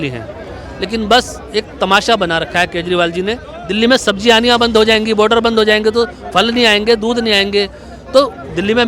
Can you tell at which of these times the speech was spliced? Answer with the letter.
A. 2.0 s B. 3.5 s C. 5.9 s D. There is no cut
B